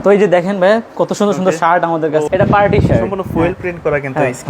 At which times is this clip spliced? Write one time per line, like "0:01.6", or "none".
0:02.3